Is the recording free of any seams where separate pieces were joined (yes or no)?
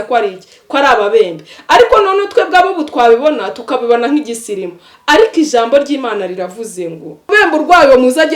no